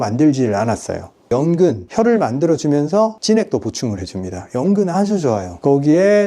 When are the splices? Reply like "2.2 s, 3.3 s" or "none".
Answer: 1.3 s